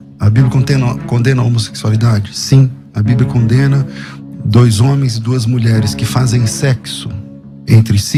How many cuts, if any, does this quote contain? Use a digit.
0